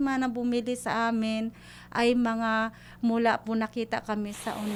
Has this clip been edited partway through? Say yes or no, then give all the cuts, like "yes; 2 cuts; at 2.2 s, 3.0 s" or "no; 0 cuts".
no; 0 cuts